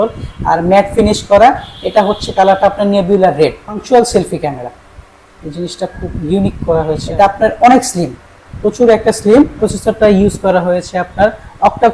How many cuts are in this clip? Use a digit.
3